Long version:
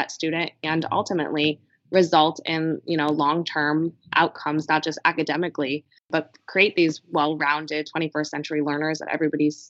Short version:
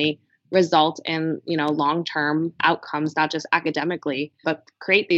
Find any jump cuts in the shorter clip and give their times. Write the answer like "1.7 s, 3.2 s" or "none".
2.5 s, 4.3 s